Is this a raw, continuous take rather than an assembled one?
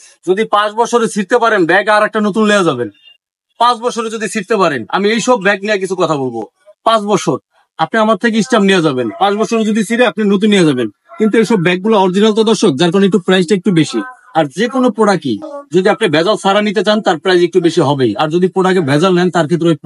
yes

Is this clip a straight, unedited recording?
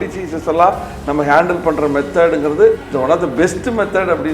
no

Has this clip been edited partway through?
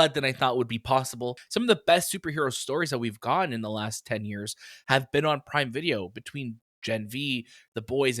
yes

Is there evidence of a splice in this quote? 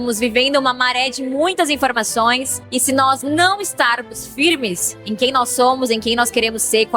yes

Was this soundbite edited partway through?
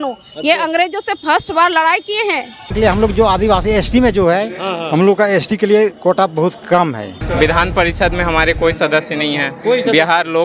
yes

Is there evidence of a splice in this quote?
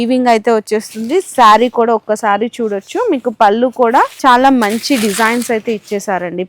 yes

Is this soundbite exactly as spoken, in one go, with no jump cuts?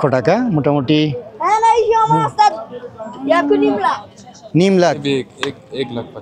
yes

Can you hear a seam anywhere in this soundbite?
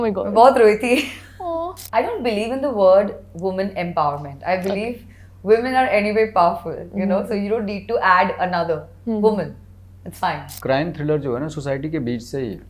yes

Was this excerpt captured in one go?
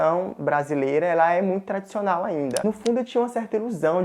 no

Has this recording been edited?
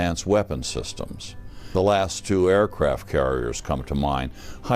yes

